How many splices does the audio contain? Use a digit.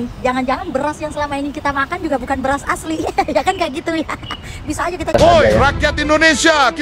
1